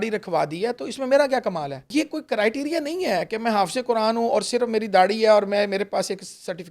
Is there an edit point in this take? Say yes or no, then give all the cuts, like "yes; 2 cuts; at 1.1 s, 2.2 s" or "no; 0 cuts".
yes; 1 cut; at 1.8 s